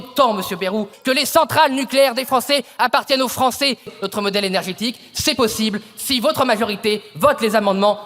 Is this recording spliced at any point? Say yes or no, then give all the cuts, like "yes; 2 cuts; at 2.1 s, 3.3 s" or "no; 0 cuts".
yes; 2 cuts; at 0.9 s, 3.9 s